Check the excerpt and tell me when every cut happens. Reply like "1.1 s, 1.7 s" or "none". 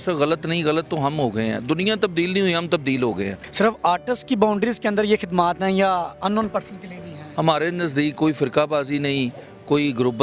3.4 s, 7.2 s